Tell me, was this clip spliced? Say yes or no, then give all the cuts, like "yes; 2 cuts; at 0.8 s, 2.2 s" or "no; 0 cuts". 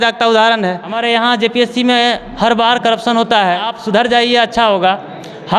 yes; 2 cuts; at 1.0 s, 3.7 s